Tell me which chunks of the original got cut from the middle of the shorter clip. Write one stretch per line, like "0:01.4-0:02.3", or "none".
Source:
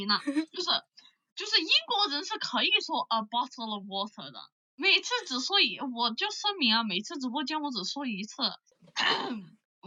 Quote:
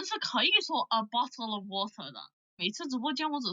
0:04.8-0:06.9